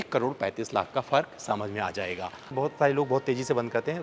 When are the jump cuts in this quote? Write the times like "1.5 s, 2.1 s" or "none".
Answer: 2.5 s